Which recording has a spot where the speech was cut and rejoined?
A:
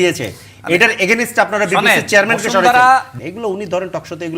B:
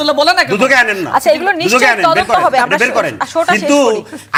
A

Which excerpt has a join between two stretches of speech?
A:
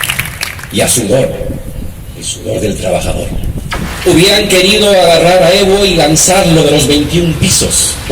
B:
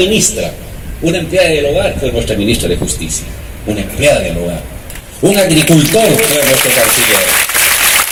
A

